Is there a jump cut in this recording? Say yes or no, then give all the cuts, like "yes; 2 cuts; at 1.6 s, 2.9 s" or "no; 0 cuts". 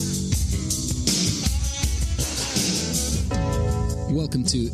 no; 0 cuts